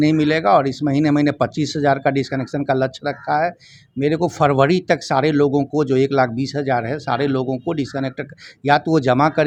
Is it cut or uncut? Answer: uncut